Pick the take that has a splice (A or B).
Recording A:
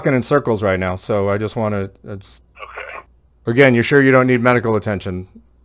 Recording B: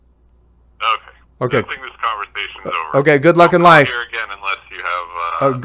A